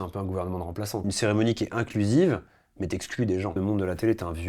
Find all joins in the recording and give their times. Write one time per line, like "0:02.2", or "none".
0:01.0
0:03.5